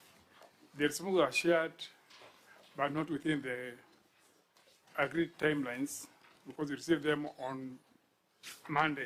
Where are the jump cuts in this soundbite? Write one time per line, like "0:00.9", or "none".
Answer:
none